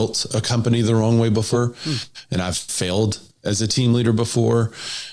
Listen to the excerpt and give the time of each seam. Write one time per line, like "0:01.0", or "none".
0:01.6